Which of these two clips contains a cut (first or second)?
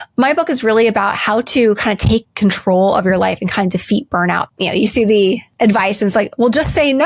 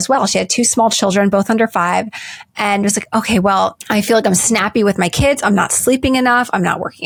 first